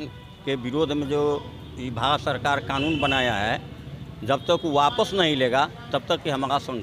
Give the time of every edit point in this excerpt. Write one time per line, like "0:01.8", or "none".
none